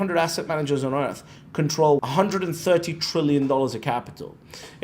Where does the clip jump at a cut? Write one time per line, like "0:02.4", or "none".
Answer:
0:02.1